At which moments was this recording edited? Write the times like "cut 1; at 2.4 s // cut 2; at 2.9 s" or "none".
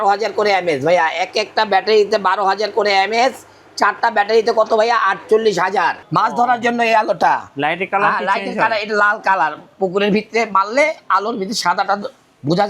cut 1; at 6.0 s